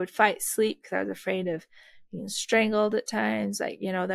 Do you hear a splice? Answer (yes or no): no